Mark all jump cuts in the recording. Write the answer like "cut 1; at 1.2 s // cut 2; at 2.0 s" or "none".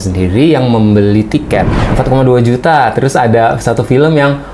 cut 1; at 1.8 s